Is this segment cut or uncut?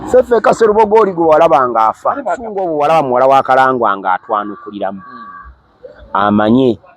cut